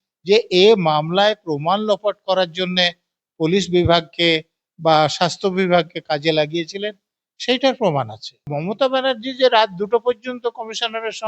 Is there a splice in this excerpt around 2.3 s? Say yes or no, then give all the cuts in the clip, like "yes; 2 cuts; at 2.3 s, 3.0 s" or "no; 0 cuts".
no; 1 cut; at 8.5 s